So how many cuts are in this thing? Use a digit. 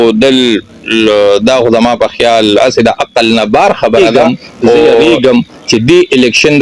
1